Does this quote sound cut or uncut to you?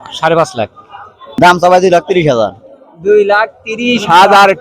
cut